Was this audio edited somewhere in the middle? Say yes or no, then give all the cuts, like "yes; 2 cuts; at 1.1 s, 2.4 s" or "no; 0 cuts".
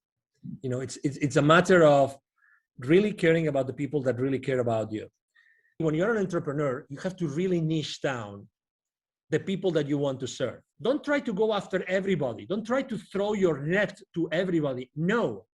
yes; 2 cuts; at 5.8 s, 10.7 s